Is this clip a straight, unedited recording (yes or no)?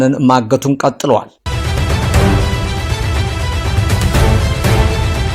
no